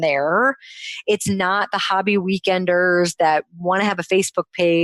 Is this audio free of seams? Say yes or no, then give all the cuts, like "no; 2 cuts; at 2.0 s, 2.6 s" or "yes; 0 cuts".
yes; 0 cuts